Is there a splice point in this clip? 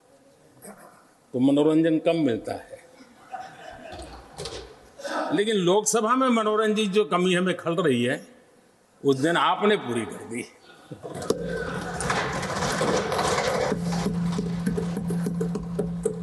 no; 0 cuts

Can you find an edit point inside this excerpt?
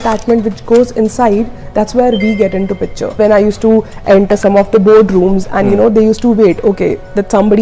yes; 1 cut; at 3.2 s

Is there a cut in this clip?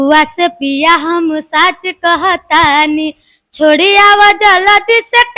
no; 0 cuts

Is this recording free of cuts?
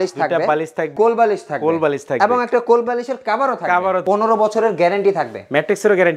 no; 2 cuts; at 0.9 s, 4.0 s

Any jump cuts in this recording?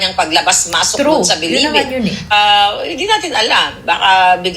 yes; 1 cut; at 2.3 s

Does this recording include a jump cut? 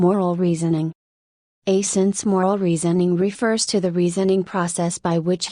yes; 2 cuts; at 1.2 s, 3.0 s

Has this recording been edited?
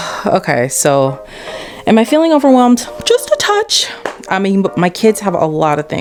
no; 0 cuts

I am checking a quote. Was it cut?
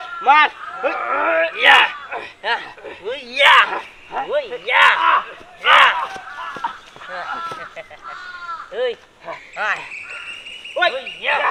no; 0 cuts

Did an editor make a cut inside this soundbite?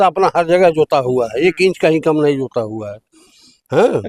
no; 0 cuts

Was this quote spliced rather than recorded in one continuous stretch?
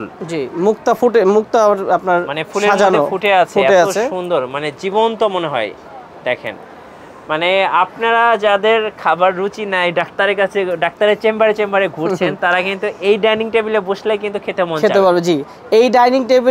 no; 0 cuts

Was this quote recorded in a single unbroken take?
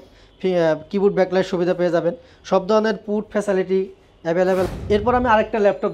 no; 1 cut; at 4.6 s

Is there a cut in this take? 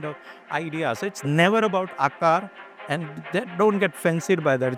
no; 0 cuts

